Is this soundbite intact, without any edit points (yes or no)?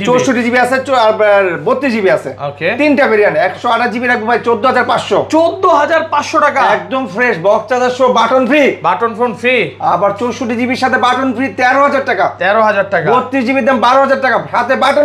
yes